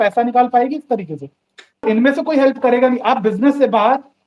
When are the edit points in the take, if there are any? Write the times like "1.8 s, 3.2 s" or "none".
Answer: 1.8 s